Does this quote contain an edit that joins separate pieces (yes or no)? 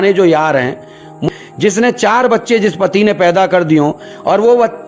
yes